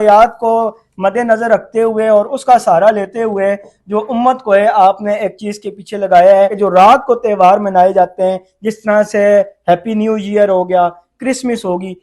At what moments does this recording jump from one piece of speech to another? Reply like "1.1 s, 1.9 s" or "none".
6.5 s